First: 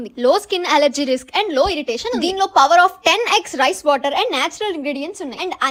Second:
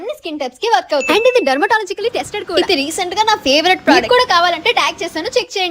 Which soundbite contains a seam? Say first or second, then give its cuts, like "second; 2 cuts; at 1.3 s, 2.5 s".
second; 3 cuts; at 1.0 s, 2.5 s, 4.0 s